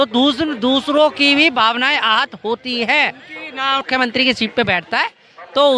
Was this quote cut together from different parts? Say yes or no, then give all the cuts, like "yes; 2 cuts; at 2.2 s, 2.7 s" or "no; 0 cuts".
yes; 1 cut; at 3.8 s